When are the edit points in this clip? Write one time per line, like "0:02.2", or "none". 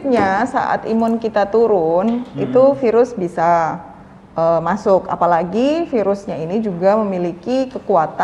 none